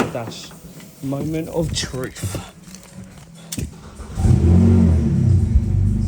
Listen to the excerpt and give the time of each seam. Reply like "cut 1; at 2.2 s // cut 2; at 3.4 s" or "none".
cut 1; at 3.7 s